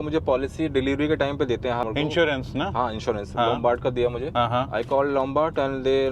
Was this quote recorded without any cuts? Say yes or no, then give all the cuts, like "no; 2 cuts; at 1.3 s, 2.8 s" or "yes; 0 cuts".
no; 2 cuts; at 1.8 s, 4.2 s